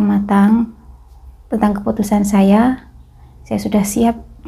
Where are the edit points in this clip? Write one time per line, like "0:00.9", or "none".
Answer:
none